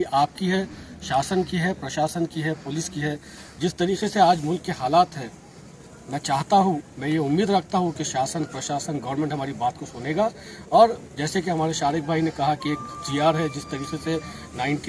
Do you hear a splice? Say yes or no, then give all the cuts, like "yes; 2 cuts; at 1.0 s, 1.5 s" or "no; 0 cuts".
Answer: no; 0 cuts